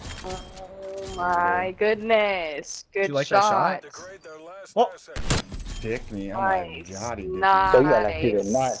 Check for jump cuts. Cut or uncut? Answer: uncut